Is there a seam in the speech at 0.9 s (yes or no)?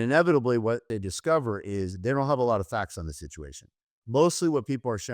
yes